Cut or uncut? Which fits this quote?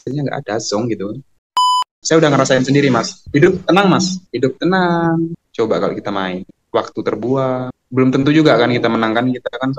cut